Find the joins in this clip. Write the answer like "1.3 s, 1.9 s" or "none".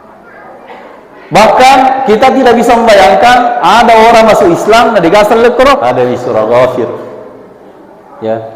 5.8 s